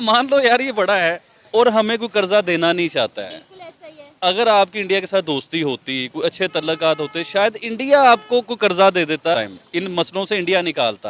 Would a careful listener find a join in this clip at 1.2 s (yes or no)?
yes